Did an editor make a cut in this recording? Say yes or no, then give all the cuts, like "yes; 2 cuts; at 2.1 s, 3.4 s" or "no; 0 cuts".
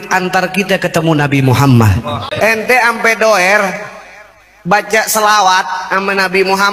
yes; 1 cut; at 2.2 s